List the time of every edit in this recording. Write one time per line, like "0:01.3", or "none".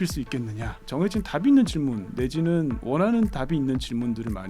0:00.8
0:02.8

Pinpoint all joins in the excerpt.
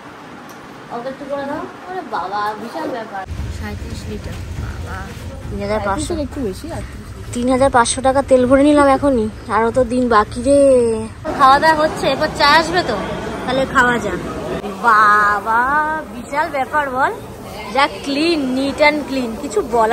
0:03.3
0:11.3
0:14.5

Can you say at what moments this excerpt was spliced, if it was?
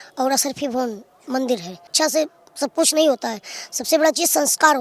0:01.8

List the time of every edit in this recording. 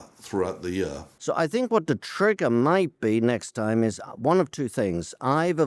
0:01.1

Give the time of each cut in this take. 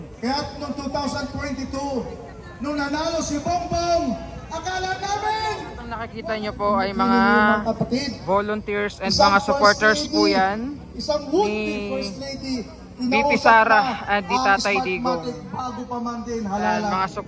0:06.1

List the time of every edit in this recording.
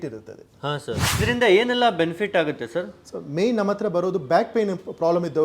0:01.2

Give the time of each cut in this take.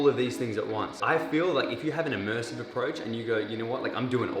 0:01.0

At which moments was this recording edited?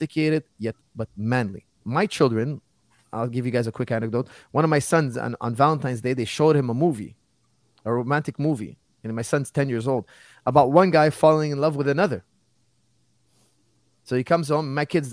none

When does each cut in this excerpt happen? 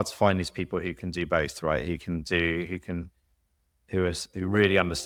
none

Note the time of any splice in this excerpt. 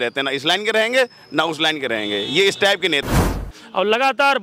0:03.4

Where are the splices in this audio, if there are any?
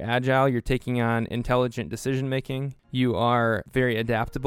0:02.8
0:03.7

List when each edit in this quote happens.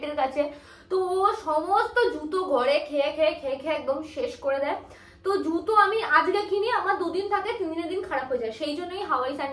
none

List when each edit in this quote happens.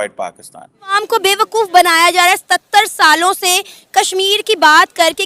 0:00.9

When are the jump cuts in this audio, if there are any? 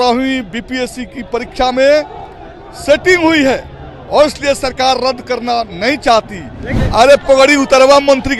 0:06.7

